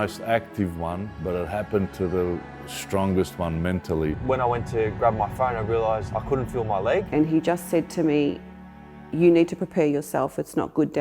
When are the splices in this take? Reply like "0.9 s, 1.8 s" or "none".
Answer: 1.1 s, 4.2 s, 6.1 s, 7.1 s

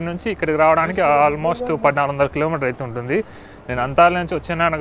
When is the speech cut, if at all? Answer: none

